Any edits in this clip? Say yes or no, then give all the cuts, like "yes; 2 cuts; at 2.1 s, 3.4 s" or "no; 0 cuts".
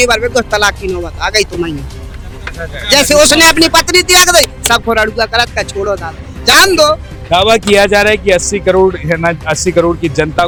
no; 0 cuts